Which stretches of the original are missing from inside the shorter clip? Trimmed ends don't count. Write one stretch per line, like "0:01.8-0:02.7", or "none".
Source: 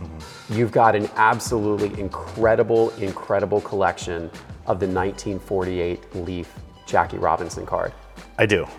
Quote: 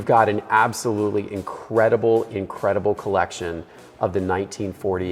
none